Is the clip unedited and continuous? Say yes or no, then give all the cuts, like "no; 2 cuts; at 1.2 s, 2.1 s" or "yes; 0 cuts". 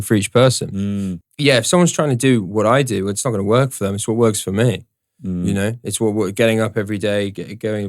no; 1 cut; at 1.1 s